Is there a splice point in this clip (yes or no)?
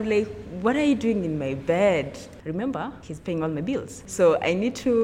yes